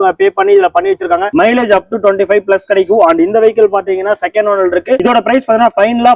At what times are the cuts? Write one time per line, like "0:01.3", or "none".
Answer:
0:05.0